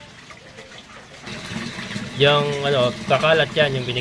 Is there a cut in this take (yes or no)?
yes